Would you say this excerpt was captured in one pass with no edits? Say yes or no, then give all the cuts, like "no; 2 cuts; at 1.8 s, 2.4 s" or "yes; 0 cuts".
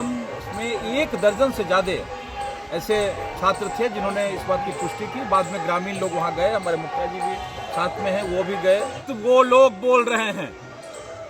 no; 1 cut; at 9.1 s